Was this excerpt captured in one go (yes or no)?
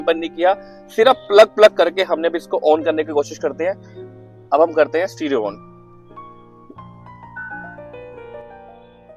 yes